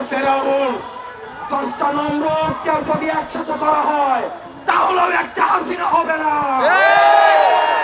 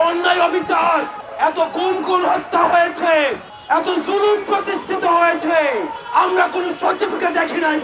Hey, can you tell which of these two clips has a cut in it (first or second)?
second